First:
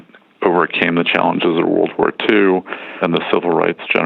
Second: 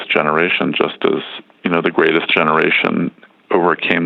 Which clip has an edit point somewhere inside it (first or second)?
first